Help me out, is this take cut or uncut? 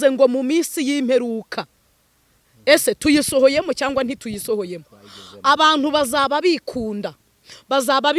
uncut